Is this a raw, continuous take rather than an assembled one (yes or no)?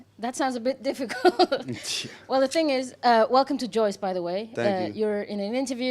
no